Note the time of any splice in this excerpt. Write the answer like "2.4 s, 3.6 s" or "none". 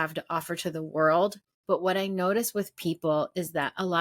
1.5 s